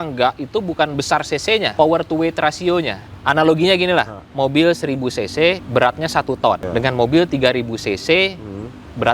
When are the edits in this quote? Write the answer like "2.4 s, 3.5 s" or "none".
1.7 s, 3.0 s, 4.2 s, 5.6 s, 6.6 s